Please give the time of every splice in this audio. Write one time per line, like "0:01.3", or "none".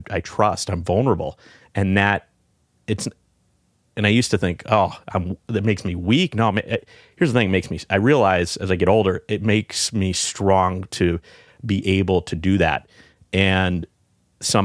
none